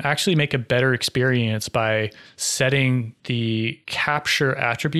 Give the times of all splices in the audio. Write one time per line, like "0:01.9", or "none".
0:03.4

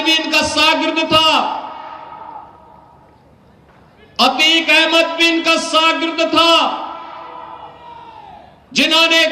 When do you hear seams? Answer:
none

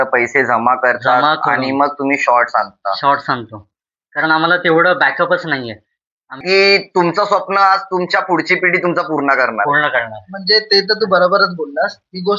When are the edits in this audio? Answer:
0:06.4

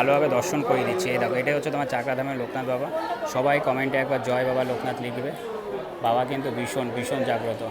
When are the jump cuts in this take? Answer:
none

